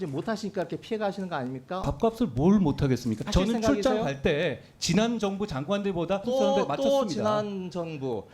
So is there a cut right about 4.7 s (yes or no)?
no